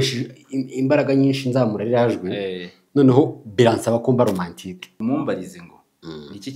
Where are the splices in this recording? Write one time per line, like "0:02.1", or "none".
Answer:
0:04.9